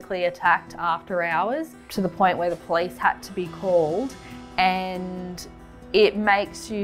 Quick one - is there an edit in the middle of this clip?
no; 0 cuts

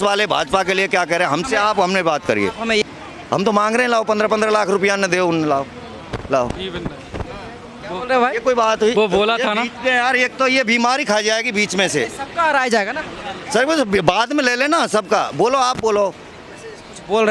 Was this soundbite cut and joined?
yes; 1 cut; at 2.8 s

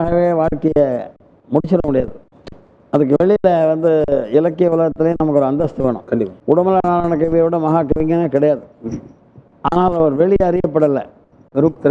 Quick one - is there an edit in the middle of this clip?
yes; 1 cut; at 6.3 s

